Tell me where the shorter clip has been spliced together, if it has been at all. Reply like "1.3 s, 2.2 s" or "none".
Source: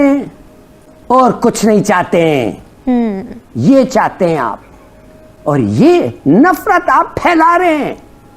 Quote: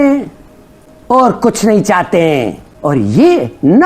2.6 s